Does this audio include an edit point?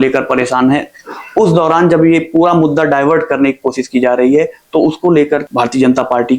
yes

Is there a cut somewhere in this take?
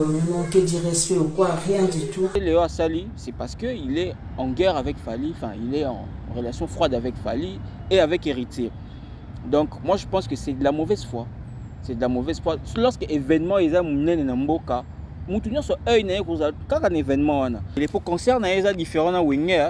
yes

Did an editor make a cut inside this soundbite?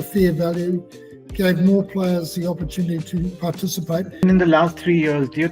yes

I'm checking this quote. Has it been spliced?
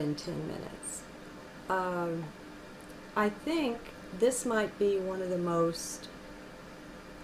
yes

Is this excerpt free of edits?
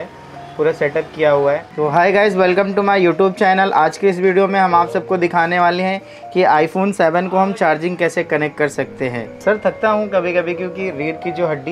no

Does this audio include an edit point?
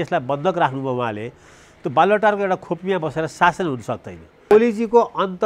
yes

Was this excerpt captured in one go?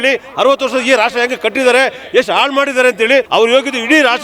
no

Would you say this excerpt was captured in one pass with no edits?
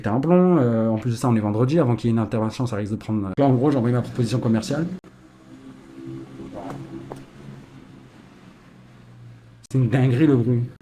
no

